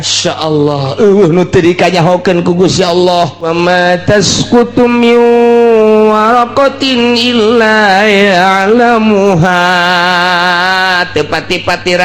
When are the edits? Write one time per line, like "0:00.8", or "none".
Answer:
0:03.5